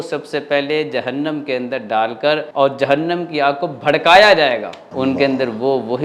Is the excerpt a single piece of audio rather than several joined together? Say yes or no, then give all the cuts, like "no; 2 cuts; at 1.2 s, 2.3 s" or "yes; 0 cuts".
no; 2 cuts; at 2.5 s, 4.8 s